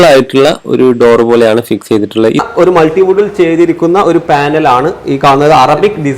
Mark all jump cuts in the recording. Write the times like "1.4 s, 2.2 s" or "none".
2.4 s